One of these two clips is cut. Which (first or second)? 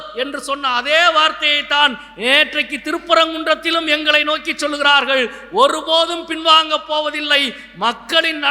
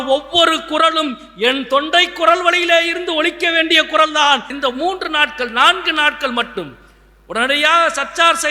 second